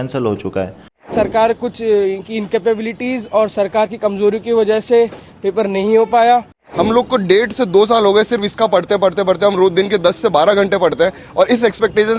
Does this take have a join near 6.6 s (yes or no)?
yes